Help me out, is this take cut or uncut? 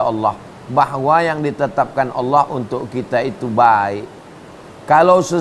uncut